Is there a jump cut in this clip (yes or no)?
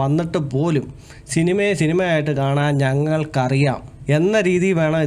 yes